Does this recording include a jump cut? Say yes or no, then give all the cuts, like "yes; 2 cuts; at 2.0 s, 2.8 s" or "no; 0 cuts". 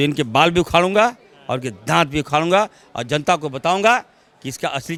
no; 0 cuts